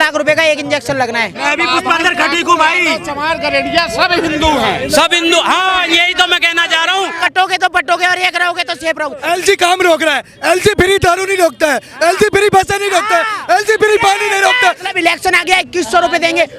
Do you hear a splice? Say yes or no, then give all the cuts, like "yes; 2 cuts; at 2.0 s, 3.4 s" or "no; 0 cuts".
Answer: yes; 4 cuts; at 1.4 s, 7.2 s, 9.2 s, 14.9 s